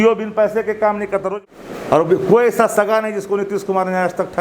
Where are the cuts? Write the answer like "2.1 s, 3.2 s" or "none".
1.3 s